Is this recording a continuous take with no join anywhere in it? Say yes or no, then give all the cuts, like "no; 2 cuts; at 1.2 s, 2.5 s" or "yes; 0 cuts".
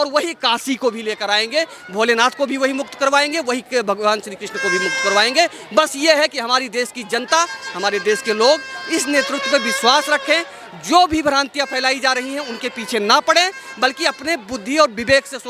yes; 0 cuts